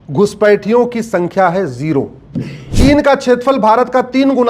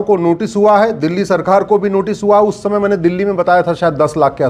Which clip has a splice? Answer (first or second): first